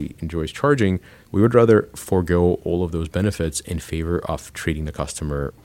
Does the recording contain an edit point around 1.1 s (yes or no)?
yes